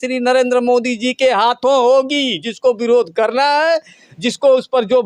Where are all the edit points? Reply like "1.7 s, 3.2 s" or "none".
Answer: none